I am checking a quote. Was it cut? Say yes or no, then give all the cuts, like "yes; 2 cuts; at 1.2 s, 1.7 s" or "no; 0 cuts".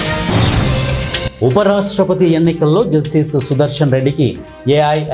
no; 0 cuts